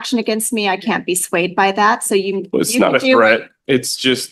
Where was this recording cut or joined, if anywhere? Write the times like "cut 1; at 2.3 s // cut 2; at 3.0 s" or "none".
none